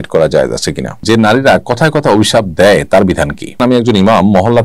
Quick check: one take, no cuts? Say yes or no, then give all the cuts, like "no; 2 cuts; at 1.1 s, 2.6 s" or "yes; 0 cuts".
no; 2 cuts; at 1.0 s, 3.5 s